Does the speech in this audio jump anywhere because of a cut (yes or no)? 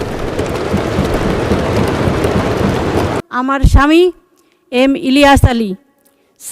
yes